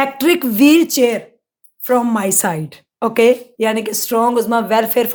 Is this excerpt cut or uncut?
uncut